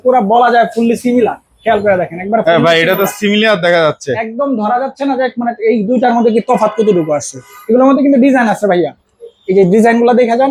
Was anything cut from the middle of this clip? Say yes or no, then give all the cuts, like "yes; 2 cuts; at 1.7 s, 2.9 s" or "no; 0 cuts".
no; 0 cuts